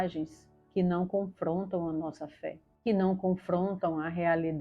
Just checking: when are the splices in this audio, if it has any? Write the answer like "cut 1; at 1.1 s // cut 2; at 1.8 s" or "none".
cut 1; at 2.7 s